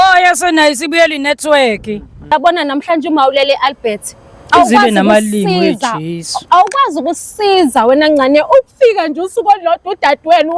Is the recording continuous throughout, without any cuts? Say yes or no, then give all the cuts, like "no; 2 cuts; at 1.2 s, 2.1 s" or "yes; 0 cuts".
no; 1 cut; at 2.3 s